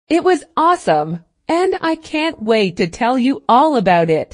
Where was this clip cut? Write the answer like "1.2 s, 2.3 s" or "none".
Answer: none

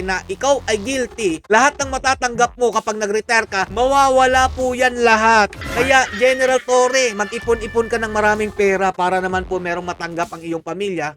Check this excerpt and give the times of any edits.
5.6 s

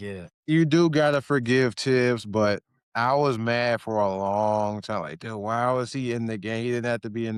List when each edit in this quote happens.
none

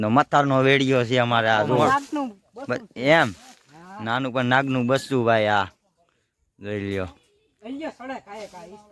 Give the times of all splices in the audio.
1.8 s

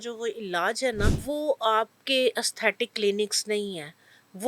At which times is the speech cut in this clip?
1.2 s

